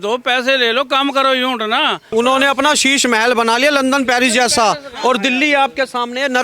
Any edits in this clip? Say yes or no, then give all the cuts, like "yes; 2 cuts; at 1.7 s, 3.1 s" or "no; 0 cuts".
yes; 1 cut; at 2.0 s